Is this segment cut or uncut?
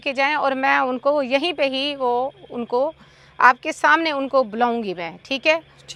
uncut